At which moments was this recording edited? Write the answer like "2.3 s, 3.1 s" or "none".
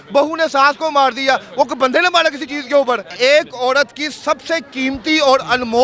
3.1 s